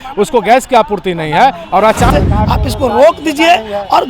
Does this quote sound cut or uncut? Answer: cut